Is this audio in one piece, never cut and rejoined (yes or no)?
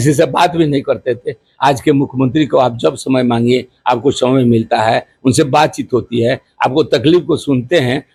yes